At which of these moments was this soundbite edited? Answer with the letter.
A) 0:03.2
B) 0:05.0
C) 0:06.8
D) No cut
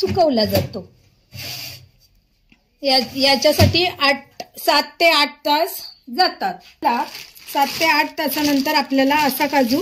C